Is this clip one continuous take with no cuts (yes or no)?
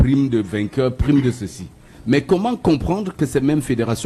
yes